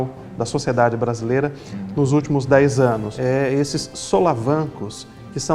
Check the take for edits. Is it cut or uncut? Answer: cut